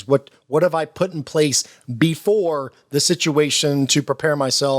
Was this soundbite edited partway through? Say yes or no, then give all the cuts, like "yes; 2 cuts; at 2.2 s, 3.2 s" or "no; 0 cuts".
no; 0 cuts